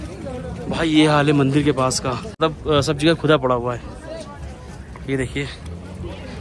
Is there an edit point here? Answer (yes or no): yes